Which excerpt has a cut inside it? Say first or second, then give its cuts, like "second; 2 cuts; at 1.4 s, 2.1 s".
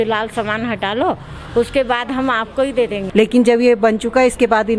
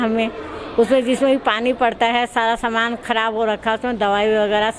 first; 1 cut; at 3.1 s